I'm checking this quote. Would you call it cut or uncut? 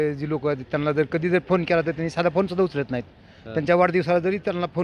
uncut